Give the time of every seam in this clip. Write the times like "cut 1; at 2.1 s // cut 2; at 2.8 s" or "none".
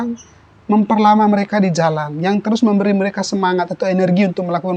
none